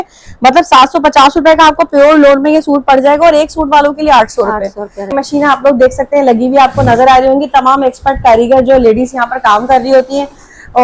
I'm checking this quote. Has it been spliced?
yes; 1 cut; at 5.1 s

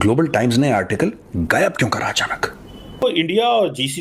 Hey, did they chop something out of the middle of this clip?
yes; 1 cut; at 3.0 s

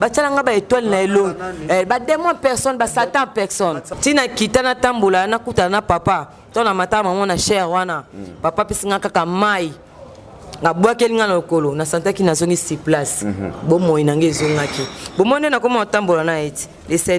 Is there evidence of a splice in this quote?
yes; 1 cut; at 3.9 s

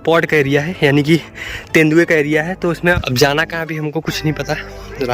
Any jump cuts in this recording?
yes; 1 cut; at 3.0 s

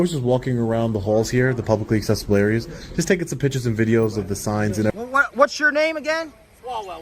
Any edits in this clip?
yes; 1 cut; at 4.9 s

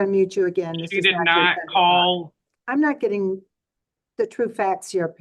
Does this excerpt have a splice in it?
yes; 1 cut; at 2.5 s

